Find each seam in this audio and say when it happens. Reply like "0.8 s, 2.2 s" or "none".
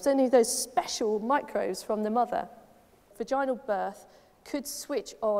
3.1 s

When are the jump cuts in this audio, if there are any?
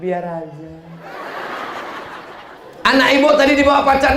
2.6 s

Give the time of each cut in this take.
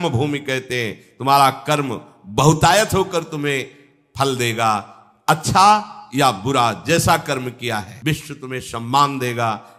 7.9 s

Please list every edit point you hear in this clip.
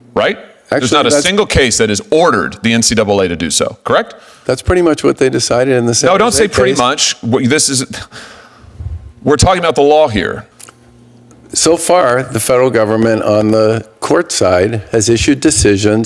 10.4 s

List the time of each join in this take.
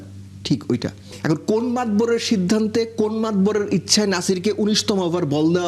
1.1 s

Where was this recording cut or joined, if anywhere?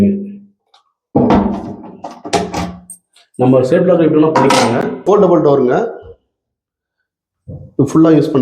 5.0 s

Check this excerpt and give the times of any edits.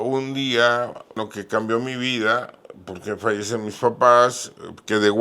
1.2 s

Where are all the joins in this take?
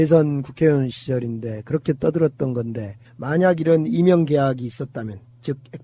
none

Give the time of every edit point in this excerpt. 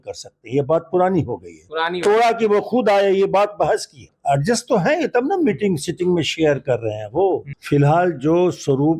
4.1 s, 7.5 s

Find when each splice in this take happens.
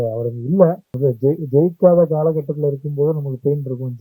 0.9 s

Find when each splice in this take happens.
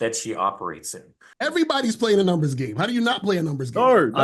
1.3 s

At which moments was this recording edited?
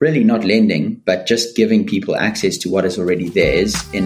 none

